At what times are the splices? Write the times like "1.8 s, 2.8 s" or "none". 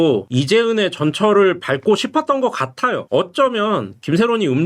3.0 s